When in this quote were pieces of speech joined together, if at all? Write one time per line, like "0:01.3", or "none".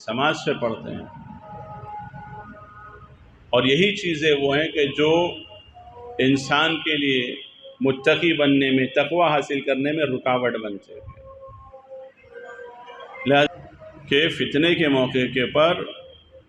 0:13.5